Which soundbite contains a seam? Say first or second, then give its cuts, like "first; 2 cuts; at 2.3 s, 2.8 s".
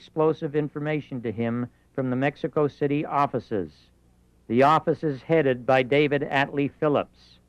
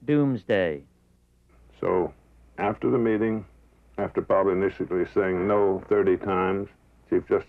first; 1 cut; at 2.4 s